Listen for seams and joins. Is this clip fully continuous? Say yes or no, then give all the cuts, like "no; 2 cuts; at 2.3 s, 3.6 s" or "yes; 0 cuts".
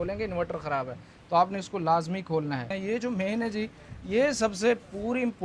no; 1 cut; at 2.7 s